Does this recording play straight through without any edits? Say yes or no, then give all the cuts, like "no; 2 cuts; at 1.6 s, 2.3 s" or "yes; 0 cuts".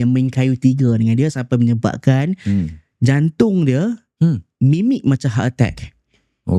yes; 0 cuts